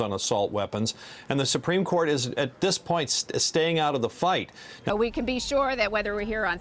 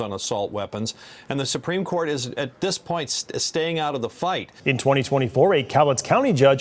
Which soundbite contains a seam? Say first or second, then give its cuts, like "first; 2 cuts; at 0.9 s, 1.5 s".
second; 1 cut; at 4.5 s